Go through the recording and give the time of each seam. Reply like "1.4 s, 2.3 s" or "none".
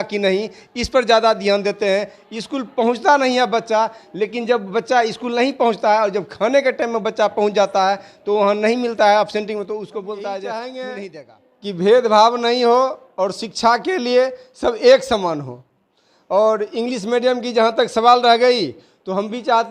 10.9 s